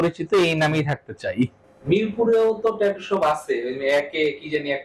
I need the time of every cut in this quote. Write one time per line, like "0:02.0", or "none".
0:01.6